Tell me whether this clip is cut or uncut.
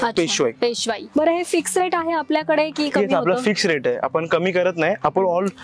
cut